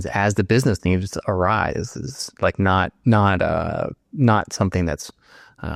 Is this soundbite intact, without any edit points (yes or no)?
yes